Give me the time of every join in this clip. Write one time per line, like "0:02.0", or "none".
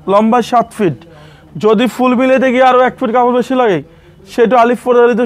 none